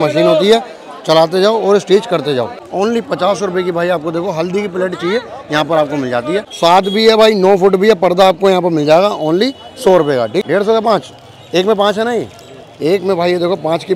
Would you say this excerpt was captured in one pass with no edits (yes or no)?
no